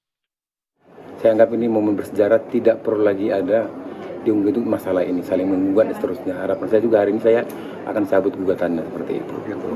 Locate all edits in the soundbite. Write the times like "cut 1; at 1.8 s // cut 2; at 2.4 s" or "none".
none

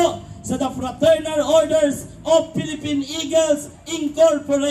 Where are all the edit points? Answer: none

